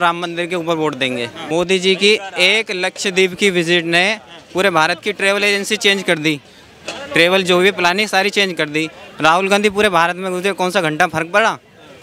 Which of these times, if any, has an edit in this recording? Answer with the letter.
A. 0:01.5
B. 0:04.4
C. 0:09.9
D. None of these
A